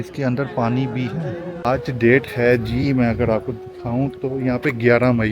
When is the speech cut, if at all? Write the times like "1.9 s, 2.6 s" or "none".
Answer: 1.5 s